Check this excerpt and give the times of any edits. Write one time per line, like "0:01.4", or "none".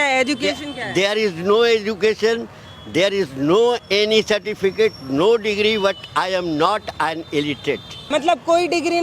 0:08.1